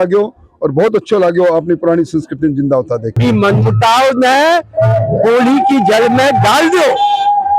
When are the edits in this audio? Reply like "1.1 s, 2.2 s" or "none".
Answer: 3.1 s